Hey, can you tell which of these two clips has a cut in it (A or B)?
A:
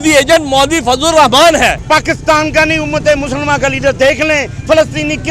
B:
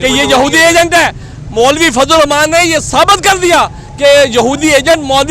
A